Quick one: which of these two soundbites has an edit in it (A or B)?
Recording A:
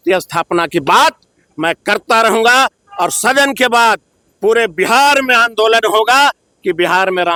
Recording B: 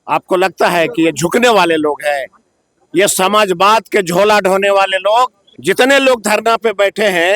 B